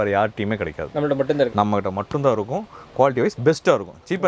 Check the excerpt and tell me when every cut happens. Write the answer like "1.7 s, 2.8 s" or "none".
none